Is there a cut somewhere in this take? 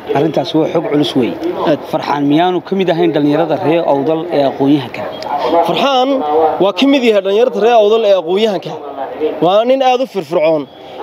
no; 0 cuts

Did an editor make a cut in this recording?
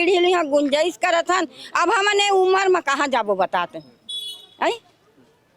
no; 0 cuts

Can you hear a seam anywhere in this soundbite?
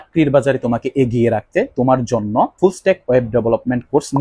yes; 1 cut; at 2.5 s

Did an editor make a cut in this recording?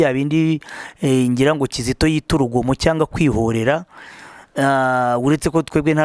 no; 0 cuts

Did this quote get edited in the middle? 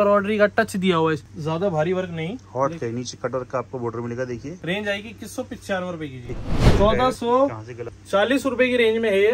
yes; 4 cuts; at 1.3 s, 2.4 s, 4.5 s, 6.7 s

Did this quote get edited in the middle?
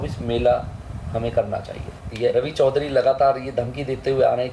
yes; 1 cut; at 2.2 s

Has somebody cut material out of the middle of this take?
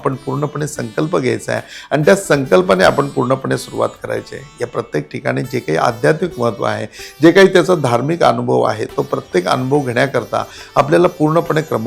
no; 0 cuts

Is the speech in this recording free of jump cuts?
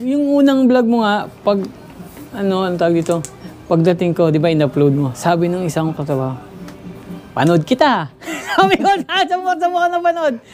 yes; 0 cuts

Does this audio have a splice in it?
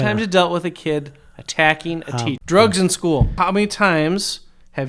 yes; 2 cuts; at 2.4 s, 3.3 s

